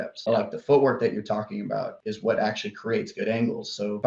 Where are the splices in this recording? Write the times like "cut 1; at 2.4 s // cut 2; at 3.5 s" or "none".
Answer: cut 1; at 1.9 s